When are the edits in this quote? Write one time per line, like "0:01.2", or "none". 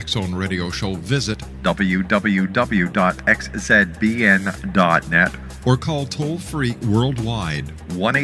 none